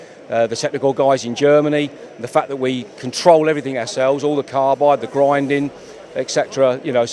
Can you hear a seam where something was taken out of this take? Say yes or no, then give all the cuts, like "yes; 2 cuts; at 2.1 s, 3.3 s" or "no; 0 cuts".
no; 0 cuts